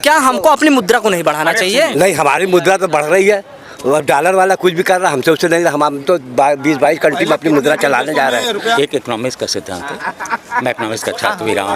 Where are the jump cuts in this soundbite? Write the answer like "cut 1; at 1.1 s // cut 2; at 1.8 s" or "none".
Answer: cut 1; at 8.8 s